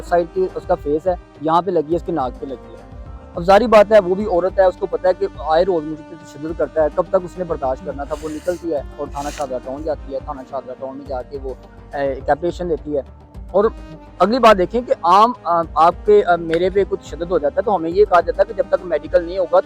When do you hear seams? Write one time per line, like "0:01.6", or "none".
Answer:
none